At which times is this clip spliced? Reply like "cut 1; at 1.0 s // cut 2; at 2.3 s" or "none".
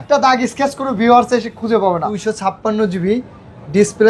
cut 1; at 2.2 s